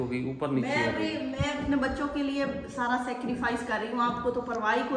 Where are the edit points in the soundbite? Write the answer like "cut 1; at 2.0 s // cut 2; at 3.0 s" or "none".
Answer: none